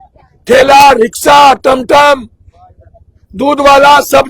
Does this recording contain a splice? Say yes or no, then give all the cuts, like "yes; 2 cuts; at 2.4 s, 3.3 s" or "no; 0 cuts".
no; 0 cuts